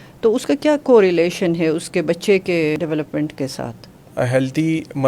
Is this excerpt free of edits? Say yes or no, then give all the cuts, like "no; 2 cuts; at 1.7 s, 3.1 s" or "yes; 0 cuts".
no; 2 cuts; at 2.8 s, 4.1 s